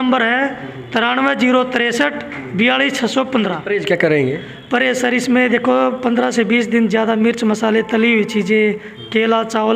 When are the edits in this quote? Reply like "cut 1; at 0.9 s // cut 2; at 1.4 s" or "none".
cut 1; at 3.6 s